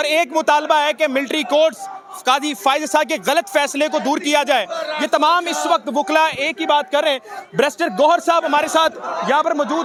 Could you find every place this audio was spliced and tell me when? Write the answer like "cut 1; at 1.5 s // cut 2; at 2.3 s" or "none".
none